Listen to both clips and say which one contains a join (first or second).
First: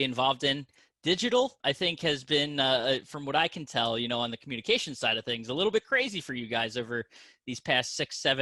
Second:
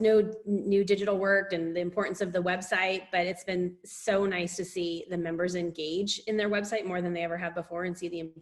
first